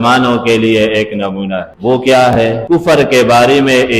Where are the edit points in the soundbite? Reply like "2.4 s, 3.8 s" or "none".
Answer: 1.7 s, 2.6 s